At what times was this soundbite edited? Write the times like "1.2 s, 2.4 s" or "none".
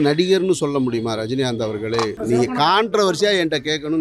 2.2 s